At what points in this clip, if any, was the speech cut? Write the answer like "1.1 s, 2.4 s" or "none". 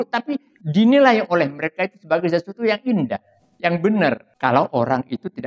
4.3 s